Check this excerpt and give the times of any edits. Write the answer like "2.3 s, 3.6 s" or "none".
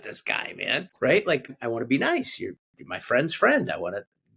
0.9 s, 1.5 s